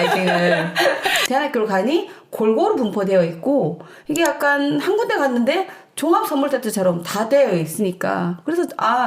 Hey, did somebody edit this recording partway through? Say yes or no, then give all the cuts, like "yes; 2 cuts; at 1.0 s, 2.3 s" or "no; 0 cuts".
yes; 1 cut; at 1.0 s